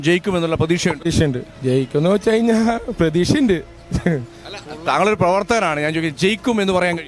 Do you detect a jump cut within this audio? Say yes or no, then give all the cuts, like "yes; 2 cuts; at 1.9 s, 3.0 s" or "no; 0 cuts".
yes; 1 cut; at 1.0 s